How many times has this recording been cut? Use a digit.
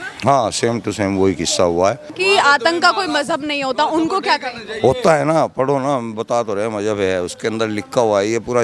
1